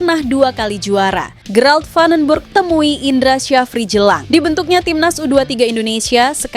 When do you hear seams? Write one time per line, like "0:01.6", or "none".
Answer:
0:01.4